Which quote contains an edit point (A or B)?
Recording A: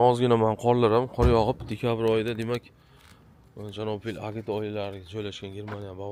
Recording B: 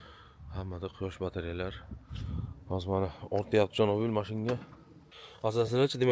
B